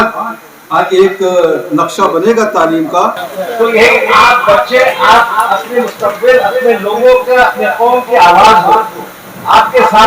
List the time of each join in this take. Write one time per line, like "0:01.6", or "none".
0:03.2